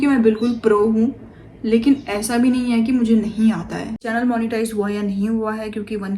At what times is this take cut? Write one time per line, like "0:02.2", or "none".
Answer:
0:04.0